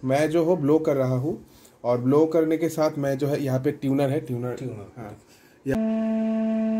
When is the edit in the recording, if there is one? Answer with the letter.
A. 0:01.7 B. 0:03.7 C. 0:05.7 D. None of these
C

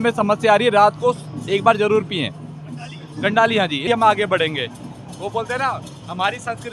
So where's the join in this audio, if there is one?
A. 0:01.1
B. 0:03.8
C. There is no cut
B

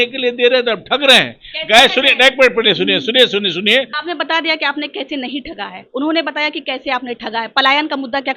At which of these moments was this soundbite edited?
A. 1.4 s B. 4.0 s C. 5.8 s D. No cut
B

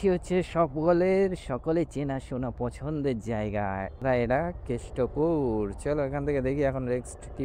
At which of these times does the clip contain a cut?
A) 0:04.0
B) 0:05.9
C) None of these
A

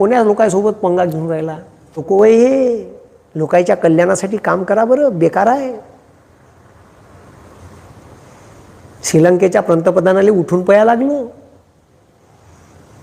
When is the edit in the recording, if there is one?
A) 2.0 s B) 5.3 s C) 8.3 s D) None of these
A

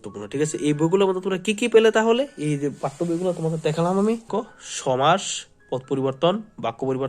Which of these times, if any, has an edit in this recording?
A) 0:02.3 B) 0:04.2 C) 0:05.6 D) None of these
B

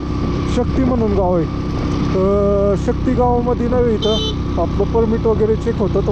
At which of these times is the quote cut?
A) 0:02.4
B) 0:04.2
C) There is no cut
C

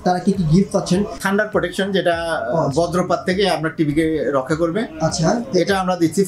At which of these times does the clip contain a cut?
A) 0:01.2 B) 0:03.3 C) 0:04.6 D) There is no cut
A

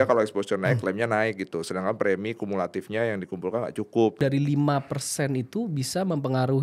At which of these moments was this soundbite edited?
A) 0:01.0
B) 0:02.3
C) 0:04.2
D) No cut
C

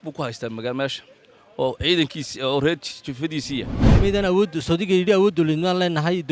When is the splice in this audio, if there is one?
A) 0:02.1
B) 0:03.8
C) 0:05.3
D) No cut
B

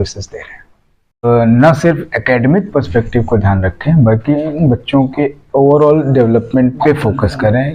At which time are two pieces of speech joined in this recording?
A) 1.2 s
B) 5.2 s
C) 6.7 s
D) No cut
A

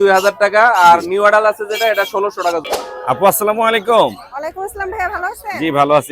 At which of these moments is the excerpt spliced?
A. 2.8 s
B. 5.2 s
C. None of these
A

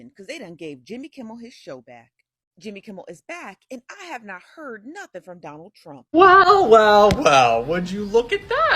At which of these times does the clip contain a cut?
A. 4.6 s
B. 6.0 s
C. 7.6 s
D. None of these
B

